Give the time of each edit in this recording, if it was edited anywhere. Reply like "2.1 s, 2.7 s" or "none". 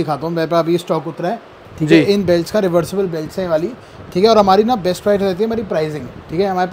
none

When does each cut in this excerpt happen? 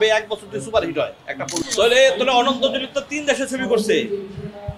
1.7 s

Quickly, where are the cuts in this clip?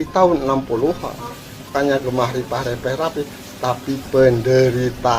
1.7 s

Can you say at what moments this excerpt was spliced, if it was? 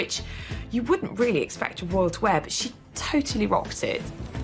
none

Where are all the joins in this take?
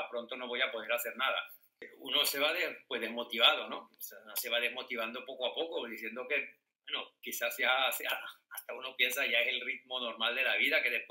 1.9 s

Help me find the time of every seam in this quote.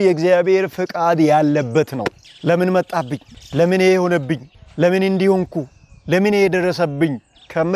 none

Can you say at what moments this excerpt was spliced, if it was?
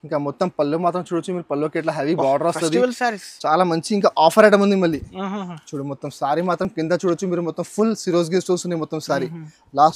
none

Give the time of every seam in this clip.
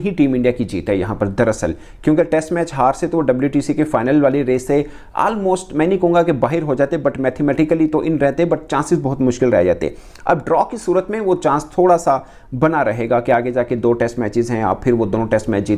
none

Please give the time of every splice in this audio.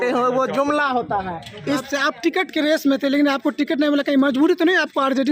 1.8 s

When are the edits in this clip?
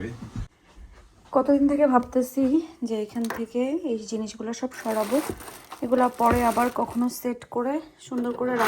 0.9 s

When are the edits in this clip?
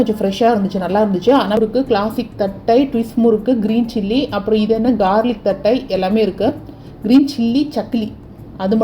1.6 s

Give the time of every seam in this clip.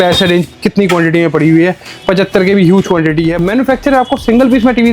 3.4 s

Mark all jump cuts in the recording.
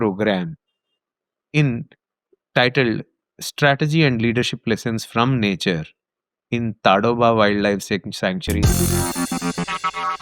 8.5 s

